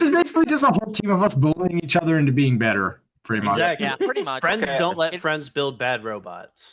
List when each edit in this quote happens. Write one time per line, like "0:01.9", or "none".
none